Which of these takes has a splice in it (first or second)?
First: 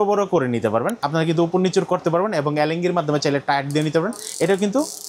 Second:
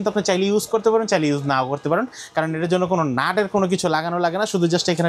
first